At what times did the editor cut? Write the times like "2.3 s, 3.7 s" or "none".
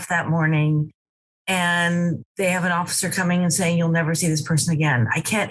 none